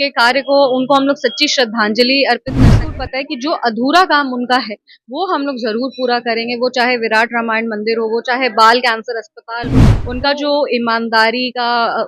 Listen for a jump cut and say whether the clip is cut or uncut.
cut